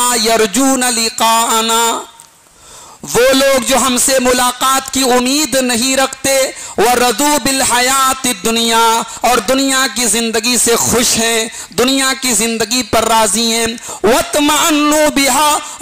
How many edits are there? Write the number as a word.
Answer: zero